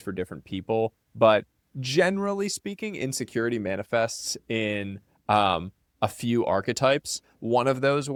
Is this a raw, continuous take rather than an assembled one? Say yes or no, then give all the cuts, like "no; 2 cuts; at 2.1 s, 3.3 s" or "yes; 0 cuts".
yes; 0 cuts